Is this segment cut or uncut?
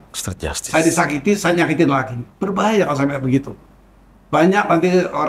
uncut